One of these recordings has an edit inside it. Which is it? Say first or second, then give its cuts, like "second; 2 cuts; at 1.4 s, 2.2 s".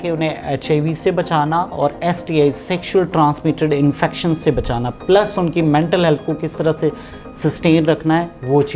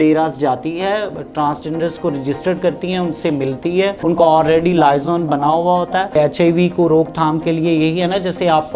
second; 2 cuts; at 4.0 s, 6.2 s